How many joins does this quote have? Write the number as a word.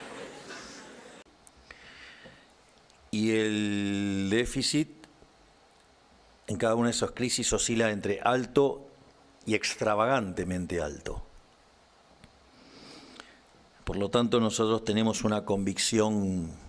one